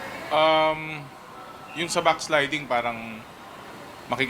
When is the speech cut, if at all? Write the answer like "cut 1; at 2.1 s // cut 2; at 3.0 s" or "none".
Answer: cut 1; at 1.9 s